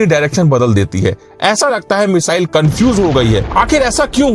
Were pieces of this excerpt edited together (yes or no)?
yes